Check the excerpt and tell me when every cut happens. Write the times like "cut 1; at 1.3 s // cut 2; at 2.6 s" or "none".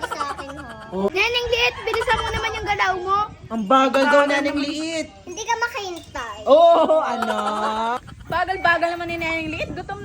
cut 1; at 1.1 s // cut 2; at 8.0 s